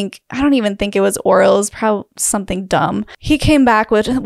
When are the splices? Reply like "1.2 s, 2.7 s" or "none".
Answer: 3.1 s